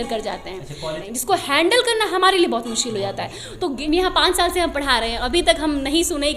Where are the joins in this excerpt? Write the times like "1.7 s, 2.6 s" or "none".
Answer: 1.1 s, 3.8 s